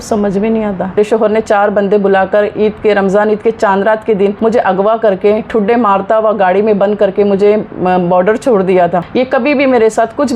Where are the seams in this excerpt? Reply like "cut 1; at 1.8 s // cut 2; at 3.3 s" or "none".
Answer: cut 1; at 1.0 s // cut 2; at 4.4 s // cut 3; at 9.1 s